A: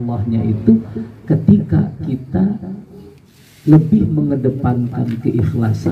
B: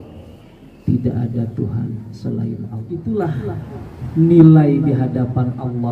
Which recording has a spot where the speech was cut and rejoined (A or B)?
B